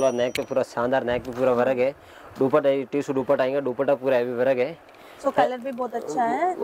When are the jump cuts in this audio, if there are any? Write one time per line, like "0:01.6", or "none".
none